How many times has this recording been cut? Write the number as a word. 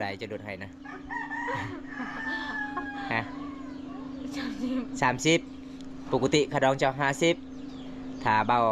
zero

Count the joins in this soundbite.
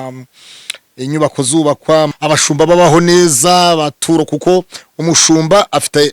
one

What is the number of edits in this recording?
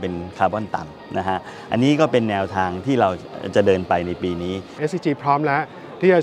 one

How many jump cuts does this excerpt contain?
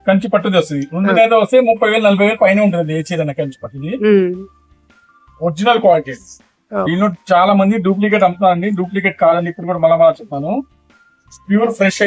zero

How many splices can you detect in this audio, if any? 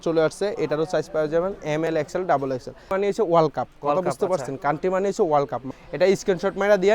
two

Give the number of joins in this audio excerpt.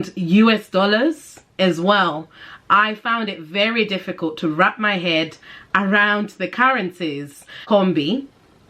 one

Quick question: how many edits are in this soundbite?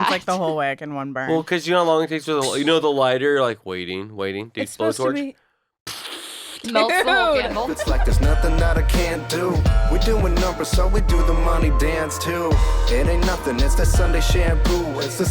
one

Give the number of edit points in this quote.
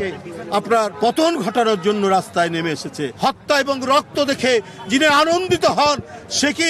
two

